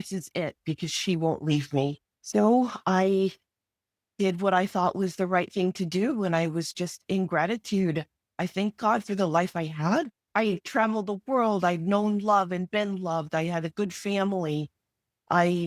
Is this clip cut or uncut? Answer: uncut